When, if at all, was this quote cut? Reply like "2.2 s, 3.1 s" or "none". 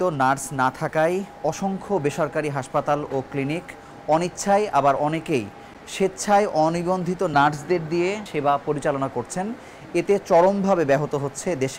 none